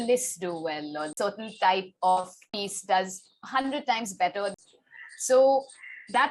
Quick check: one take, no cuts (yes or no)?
no